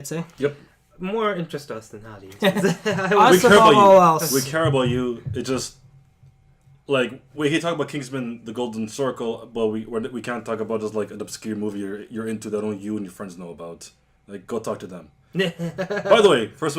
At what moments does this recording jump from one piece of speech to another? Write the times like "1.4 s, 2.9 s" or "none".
8.0 s

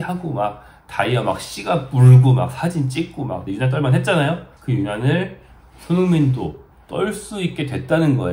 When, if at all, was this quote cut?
3.4 s, 4.5 s

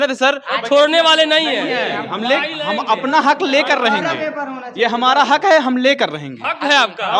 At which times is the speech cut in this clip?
none

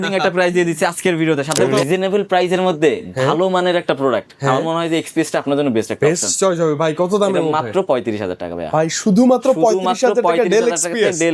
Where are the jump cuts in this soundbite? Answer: 1.6 s

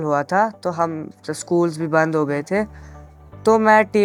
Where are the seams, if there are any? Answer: none

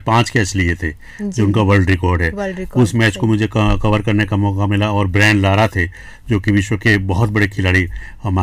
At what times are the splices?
none

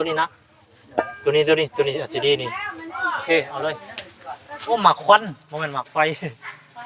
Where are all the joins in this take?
4.7 s

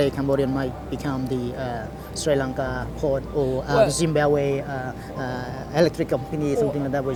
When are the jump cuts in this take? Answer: none

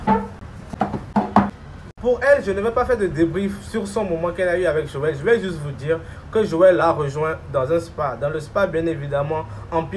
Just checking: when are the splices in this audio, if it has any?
none

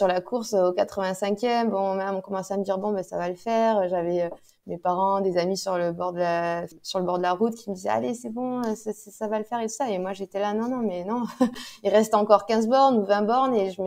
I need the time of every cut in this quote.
6.8 s

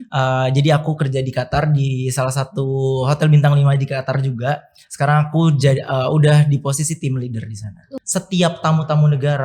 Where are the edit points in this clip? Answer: 7.8 s

